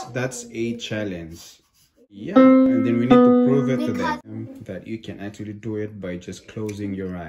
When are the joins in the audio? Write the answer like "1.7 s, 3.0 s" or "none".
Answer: 2.4 s, 4.3 s